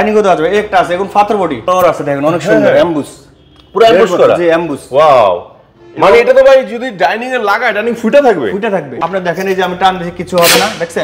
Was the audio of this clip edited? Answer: yes; 2 cuts; at 1.6 s, 8.9 s

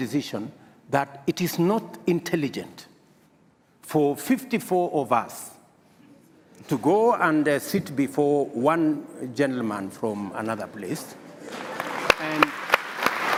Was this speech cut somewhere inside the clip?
no; 0 cuts

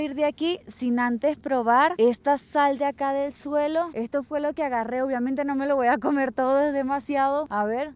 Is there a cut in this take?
no; 0 cuts

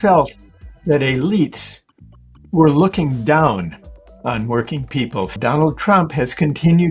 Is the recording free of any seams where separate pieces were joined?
no; 1 cut; at 5.4 s

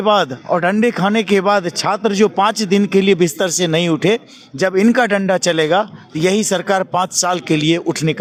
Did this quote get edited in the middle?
no; 0 cuts

